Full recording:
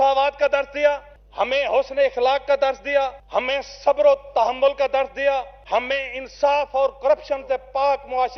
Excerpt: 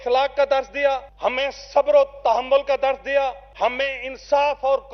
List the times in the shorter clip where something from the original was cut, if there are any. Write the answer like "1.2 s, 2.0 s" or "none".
none